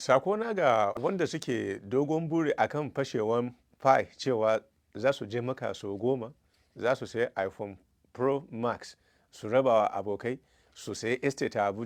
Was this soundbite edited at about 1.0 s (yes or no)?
yes